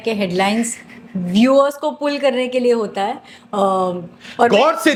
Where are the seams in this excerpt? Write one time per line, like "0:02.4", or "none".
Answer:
none